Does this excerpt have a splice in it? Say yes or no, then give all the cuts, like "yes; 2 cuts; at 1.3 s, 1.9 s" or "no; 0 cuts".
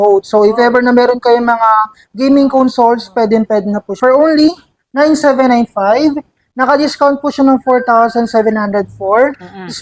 yes; 1 cut; at 4.0 s